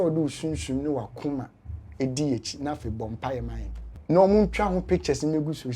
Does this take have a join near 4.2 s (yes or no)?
yes